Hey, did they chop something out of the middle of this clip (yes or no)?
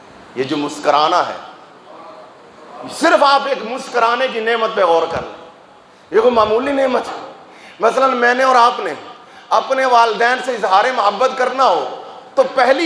no